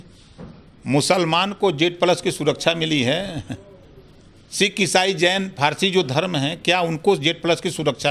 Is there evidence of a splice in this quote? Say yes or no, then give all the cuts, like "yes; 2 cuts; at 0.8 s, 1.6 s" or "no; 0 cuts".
no; 0 cuts